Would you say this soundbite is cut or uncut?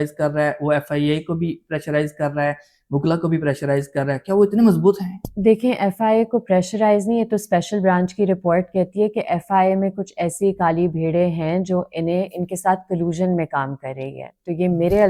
uncut